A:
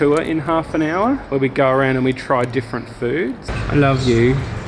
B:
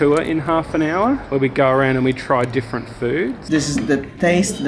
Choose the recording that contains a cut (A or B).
B